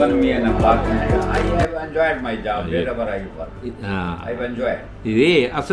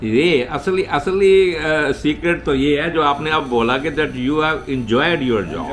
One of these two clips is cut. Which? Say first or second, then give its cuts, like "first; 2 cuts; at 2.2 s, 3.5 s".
first; 1 cut; at 1.0 s